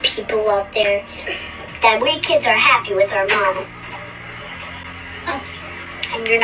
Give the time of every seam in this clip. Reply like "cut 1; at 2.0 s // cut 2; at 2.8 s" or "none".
none